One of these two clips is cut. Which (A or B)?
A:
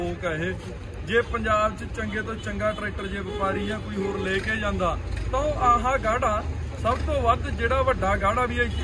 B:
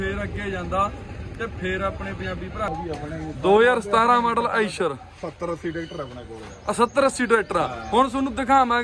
B